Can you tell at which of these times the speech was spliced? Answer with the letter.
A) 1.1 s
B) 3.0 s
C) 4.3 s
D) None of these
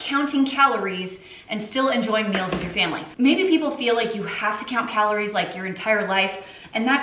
D